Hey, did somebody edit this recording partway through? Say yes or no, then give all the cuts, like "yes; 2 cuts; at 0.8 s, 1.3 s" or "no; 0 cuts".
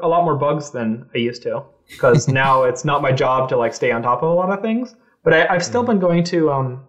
no; 0 cuts